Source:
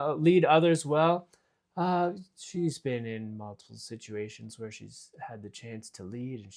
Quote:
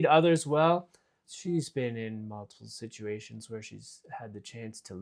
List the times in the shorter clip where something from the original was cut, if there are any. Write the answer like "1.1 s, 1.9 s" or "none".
1.2 s